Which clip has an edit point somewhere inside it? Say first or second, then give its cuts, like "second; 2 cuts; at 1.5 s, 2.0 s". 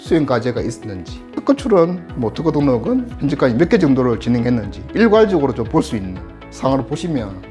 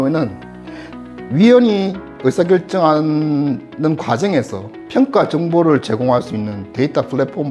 first; 2 cuts; at 1.4 s, 3.1 s